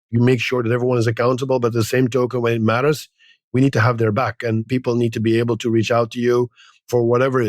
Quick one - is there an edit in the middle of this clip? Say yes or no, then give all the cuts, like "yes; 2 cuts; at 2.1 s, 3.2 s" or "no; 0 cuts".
no; 0 cuts